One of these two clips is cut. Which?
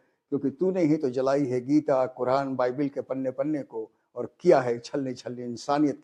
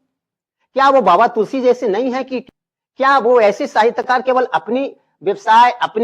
second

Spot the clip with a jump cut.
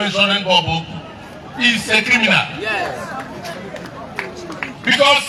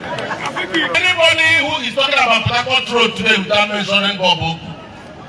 second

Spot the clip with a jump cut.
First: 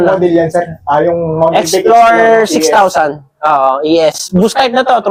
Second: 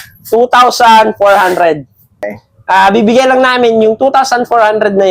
second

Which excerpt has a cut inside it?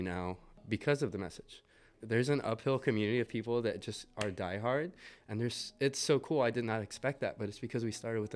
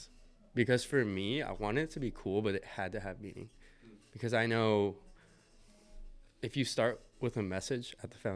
first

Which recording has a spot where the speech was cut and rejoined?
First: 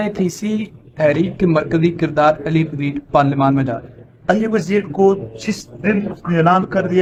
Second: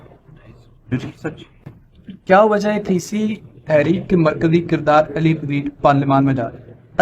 second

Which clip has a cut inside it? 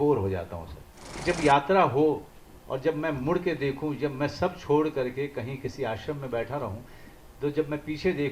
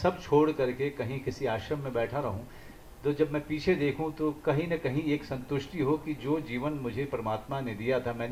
first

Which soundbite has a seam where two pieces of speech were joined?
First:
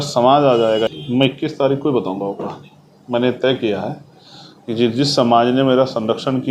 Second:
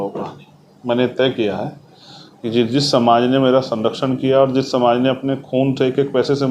first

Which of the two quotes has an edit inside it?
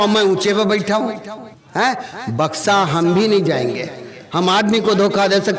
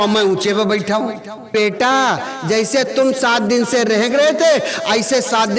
second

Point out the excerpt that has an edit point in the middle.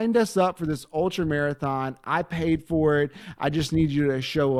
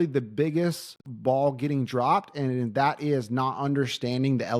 second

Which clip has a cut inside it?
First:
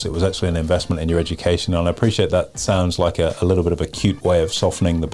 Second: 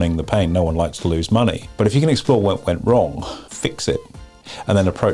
second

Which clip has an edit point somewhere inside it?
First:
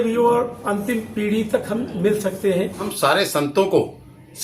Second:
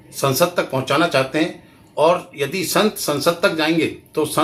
first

